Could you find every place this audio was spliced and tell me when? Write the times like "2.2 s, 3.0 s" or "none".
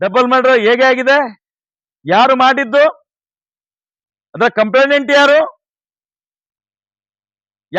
none